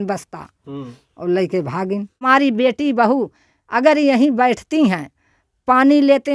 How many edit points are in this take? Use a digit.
1